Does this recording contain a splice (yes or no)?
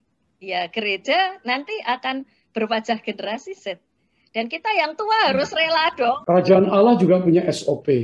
yes